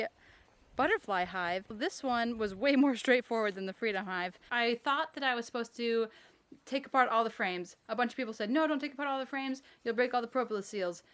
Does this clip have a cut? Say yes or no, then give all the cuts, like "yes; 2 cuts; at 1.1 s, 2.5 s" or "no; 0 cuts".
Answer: yes; 2 cuts; at 1.8 s, 4.4 s